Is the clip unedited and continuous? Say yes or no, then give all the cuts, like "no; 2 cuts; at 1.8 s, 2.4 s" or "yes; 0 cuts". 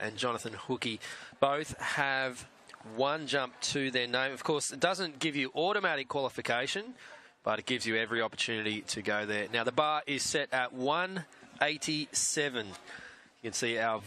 yes; 0 cuts